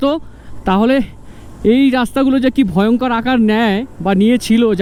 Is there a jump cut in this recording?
no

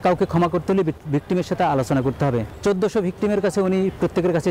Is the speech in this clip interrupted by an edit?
yes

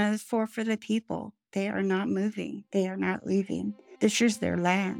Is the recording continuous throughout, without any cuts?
no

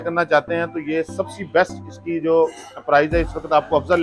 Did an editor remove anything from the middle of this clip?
no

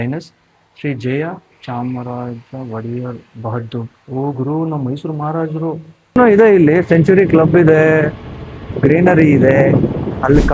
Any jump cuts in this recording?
yes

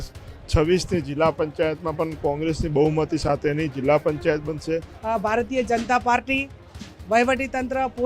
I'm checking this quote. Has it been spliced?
yes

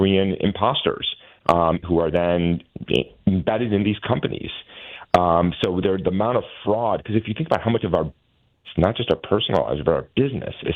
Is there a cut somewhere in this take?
no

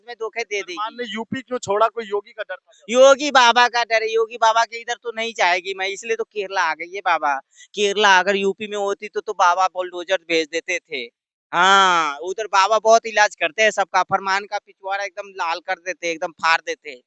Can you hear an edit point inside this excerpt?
no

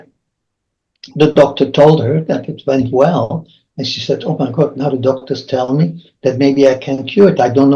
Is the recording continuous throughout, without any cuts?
yes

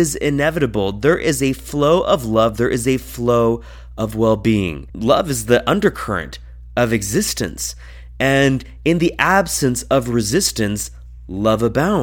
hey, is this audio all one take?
yes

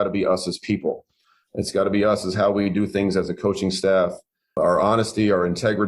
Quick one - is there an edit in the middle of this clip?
yes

